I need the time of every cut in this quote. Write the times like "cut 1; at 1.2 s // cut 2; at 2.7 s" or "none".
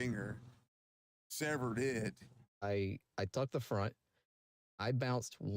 cut 1; at 2.6 s